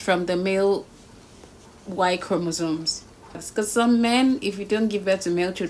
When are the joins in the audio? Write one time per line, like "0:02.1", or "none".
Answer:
0:03.4